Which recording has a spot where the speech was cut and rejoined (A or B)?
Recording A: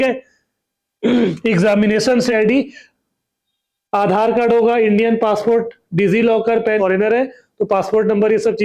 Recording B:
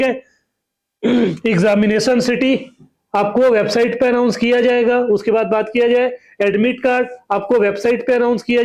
A